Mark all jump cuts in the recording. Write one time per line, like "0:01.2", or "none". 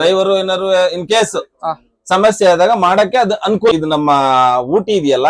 0:03.7